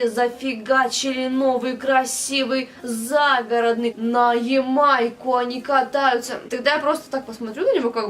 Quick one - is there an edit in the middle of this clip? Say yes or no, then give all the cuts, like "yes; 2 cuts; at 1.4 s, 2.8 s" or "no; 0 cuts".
yes; 2 cuts; at 4.0 s, 6.4 s